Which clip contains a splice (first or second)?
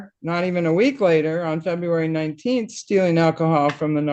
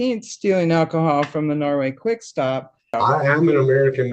second